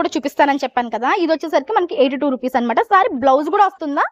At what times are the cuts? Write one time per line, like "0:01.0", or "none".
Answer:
none